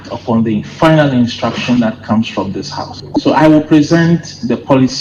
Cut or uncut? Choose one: uncut